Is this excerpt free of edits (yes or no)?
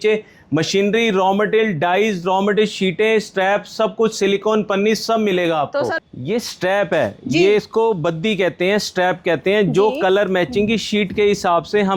no